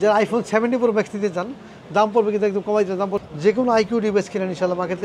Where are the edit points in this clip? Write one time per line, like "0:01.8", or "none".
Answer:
0:03.2